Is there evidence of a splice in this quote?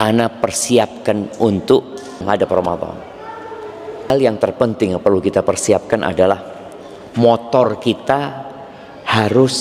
yes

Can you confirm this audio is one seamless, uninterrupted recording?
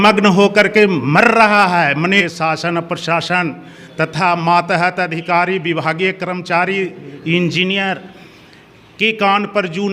no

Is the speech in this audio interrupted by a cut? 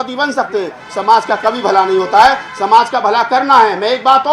no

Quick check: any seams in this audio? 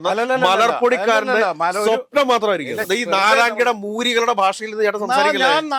yes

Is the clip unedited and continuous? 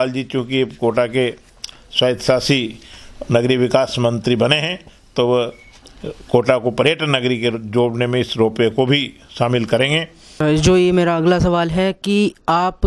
no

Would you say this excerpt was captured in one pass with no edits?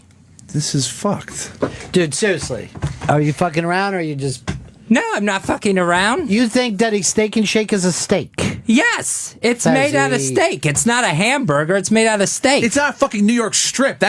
no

